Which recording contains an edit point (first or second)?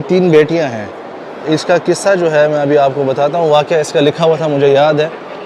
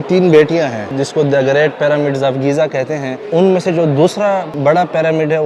second